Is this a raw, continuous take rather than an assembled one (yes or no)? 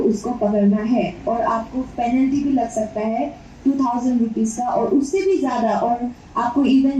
yes